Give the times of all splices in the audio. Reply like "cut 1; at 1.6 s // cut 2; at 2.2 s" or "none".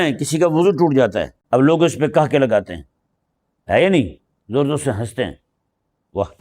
cut 1; at 1.4 s